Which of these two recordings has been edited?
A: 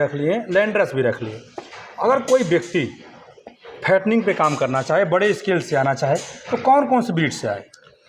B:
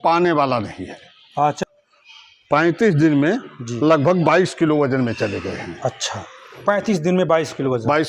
B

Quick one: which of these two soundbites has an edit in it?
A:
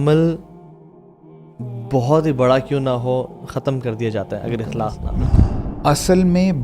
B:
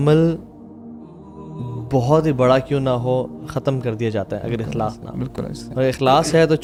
A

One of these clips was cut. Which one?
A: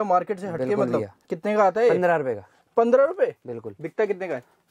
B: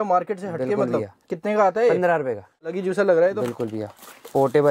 B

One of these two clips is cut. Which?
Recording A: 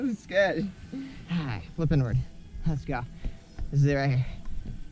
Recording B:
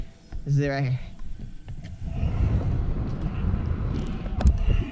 A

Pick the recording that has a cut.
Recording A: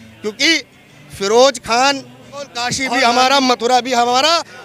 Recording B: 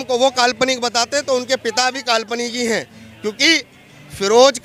A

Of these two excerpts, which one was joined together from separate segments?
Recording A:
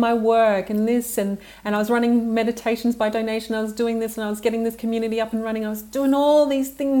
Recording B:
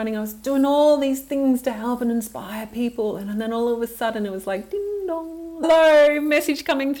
B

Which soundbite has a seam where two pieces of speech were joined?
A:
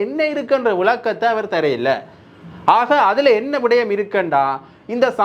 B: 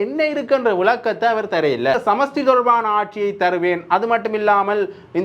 B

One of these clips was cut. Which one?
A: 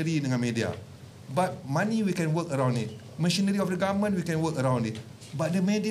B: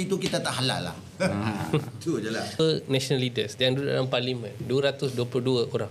B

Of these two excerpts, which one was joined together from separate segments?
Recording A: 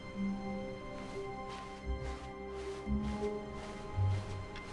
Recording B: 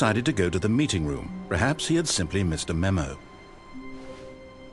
B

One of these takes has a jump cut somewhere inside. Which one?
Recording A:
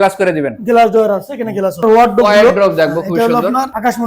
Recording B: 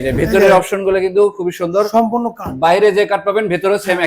A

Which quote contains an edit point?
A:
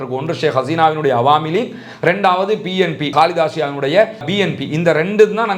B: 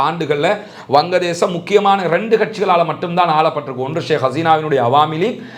A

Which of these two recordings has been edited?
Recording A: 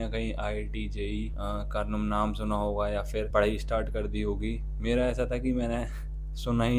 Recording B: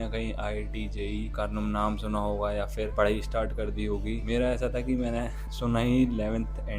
B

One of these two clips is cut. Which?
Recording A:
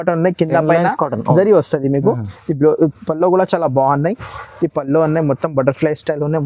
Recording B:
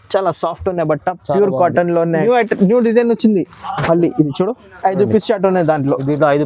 B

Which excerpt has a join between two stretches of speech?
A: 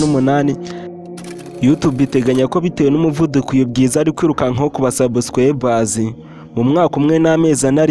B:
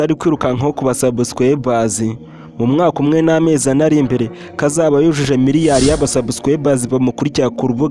A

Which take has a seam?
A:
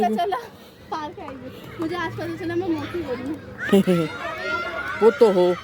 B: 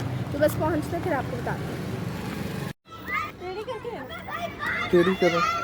B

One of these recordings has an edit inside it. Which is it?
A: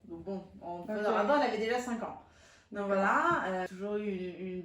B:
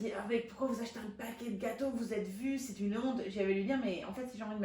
A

